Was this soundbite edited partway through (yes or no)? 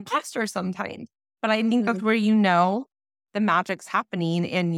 no